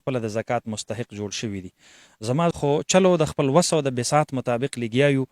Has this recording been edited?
yes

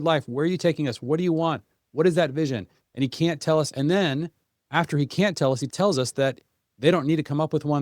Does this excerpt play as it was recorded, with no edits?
no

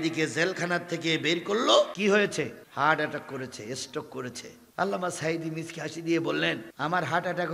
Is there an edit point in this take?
yes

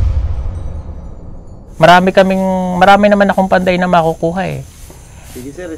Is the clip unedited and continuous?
yes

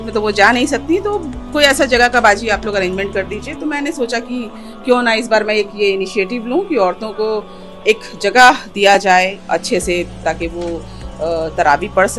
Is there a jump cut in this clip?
no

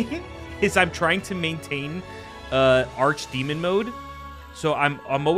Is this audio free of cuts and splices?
yes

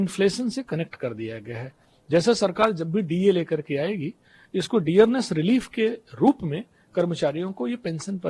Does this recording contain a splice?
no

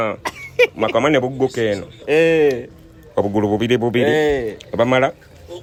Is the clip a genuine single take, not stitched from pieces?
yes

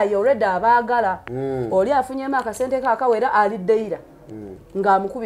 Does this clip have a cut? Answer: no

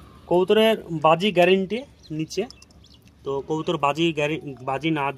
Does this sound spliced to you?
no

